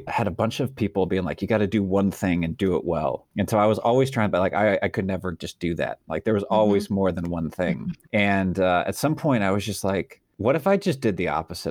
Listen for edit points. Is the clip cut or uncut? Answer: cut